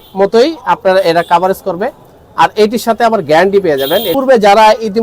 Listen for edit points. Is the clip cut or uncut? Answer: cut